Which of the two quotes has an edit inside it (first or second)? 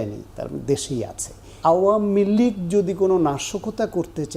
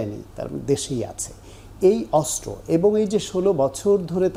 first